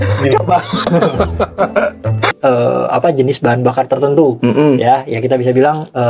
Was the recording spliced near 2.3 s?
yes; 1 cut; at 2.3 s

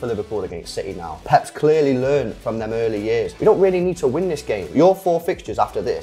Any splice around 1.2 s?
yes; 2 cuts; at 1.2 s, 3.3 s

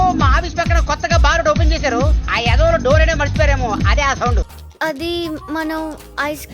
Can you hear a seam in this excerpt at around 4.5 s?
yes; 1 cut; at 4.5 s

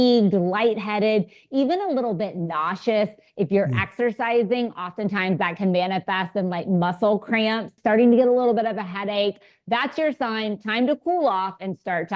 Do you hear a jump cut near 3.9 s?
no; 1 cut; at 7.8 s

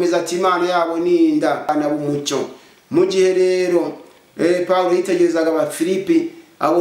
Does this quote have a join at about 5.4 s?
no; 1 cut; at 1.7 s

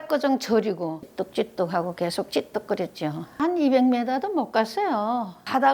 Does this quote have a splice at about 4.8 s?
no; 1 cut; at 1.0 s

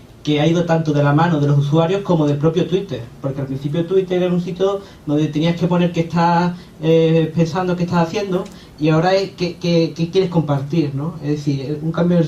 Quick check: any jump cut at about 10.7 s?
no; 1 cut; at 7.5 s

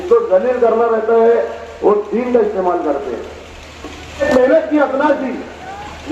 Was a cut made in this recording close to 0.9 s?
no; 1 cut; at 4.2 s

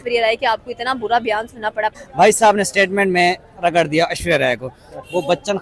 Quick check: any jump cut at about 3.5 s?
no; 1 cut; at 2.0 s

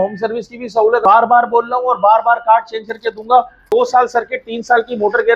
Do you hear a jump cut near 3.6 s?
yes; 2 cuts; at 1.0 s, 3.6 s

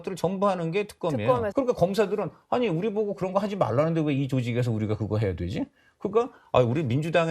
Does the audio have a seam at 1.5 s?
yes; 1 cut; at 1.5 s

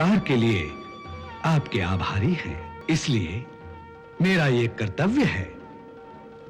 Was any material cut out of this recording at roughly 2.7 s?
yes; 1 cut; at 2.7 s

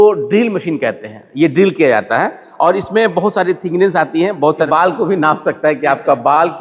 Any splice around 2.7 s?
no; 1 cut; at 4.7 s

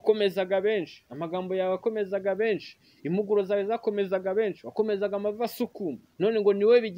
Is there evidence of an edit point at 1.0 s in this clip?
no; 0 cuts

